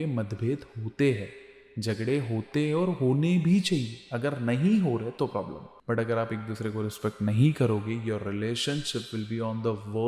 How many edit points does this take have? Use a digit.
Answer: 1